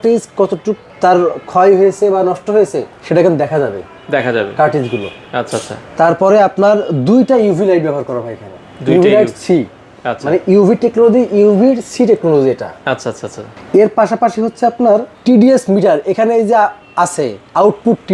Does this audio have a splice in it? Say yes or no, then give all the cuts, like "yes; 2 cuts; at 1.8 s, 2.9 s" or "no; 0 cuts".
no; 0 cuts